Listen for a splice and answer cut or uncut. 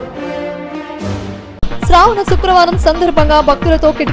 cut